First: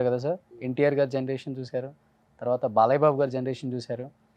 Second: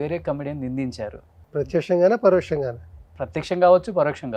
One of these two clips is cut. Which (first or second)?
second